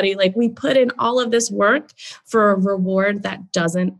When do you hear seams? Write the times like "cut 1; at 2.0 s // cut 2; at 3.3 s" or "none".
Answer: none